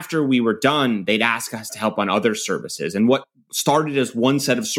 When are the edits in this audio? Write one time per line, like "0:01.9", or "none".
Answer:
0:01.7